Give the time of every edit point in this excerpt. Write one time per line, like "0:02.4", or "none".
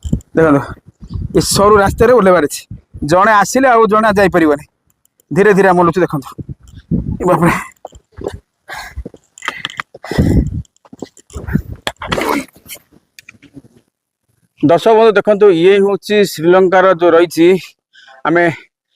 0:14.0